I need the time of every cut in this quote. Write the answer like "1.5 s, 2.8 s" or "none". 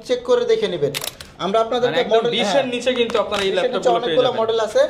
1.0 s